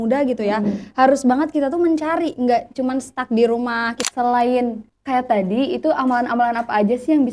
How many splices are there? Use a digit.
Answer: 2